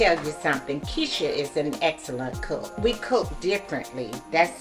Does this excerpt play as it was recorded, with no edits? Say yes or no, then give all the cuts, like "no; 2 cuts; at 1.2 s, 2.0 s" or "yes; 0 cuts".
yes; 0 cuts